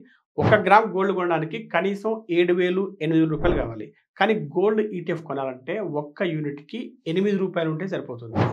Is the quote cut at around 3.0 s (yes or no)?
no